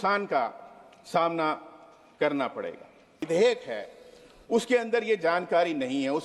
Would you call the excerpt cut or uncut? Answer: cut